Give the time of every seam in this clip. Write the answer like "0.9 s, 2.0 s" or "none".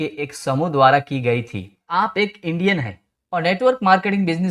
1.9 s